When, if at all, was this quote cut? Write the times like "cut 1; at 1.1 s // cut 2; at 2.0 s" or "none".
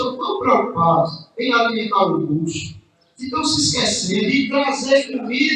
cut 1; at 4.3 s